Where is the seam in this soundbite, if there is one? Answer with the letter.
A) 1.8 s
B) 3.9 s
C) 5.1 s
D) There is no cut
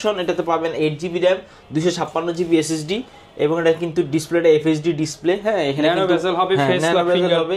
D